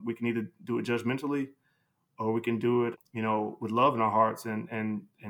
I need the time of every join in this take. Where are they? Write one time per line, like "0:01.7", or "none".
0:03.0